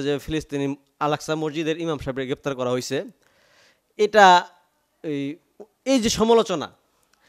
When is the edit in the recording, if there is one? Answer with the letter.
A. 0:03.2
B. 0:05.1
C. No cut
C